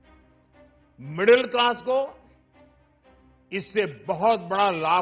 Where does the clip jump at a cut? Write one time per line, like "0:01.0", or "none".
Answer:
none